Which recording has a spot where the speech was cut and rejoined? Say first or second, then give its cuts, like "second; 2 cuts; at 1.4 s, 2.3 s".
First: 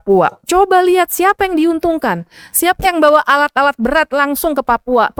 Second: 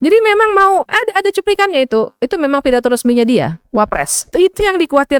second; 2 cuts; at 0.9 s, 4.3 s